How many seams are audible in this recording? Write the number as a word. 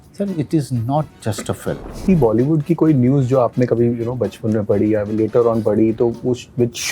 one